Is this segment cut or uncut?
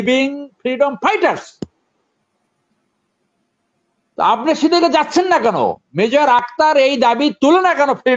uncut